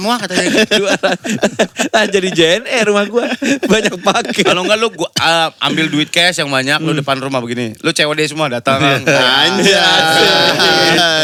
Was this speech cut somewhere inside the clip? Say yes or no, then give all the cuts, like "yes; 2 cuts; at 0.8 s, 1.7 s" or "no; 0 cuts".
no; 0 cuts